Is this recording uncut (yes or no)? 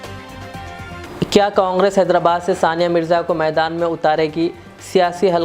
no